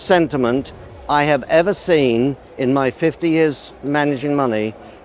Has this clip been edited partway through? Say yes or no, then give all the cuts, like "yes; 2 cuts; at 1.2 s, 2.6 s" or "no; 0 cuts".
no; 0 cuts